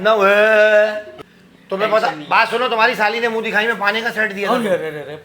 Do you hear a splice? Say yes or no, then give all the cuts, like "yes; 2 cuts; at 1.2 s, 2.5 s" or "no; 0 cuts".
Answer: yes; 1 cut; at 1.1 s